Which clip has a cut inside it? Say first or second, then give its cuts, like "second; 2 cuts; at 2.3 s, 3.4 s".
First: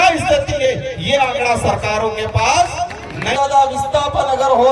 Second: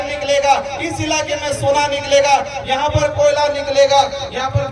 first; 1 cut; at 3.4 s